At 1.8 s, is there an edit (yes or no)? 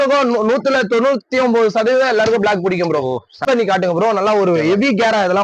no